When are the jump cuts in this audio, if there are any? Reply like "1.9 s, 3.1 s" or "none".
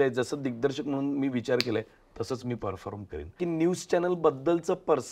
3.4 s